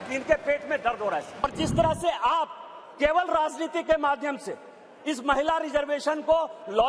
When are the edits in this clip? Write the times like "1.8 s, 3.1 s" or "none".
1.4 s